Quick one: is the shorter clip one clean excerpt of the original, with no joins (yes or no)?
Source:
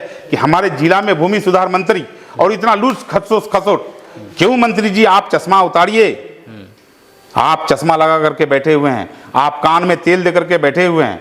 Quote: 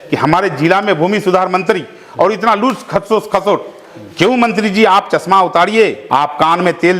no